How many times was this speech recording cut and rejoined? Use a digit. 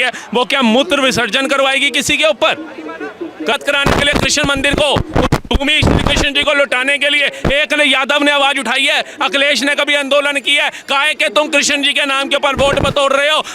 1